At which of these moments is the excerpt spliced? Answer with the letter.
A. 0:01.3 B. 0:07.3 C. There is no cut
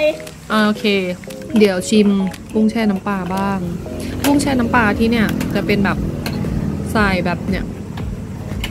A